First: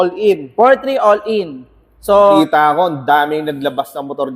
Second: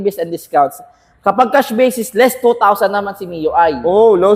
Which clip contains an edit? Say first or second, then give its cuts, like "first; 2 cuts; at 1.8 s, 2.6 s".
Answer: first; 1 cut; at 2.3 s